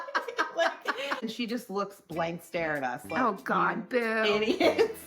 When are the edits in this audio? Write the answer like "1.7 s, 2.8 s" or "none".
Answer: 1.3 s